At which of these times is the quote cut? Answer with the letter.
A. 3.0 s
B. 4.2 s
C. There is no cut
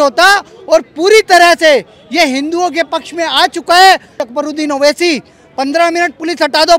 B